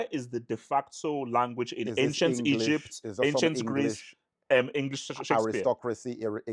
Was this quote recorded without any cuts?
yes; 0 cuts

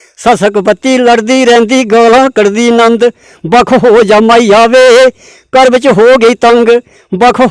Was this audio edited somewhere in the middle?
no; 0 cuts

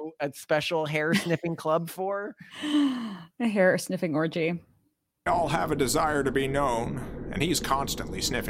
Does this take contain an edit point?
yes; 1 cut; at 5.2 s

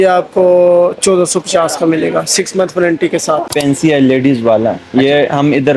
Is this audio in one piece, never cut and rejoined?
no; 1 cut; at 3.5 s

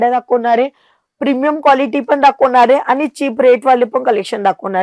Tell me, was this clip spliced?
no; 0 cuts

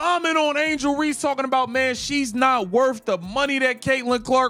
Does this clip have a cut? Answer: no; 0 cuts

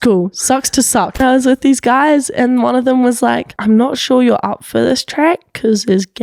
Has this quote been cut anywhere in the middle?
yes; 2 cuts; at 1.2 s, 3.5 s

